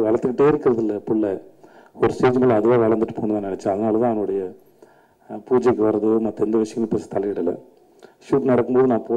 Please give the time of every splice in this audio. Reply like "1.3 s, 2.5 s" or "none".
none

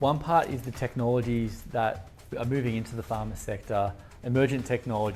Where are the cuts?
2.3 s

